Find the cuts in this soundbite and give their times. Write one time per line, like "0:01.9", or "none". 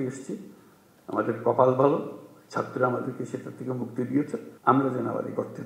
0:04.5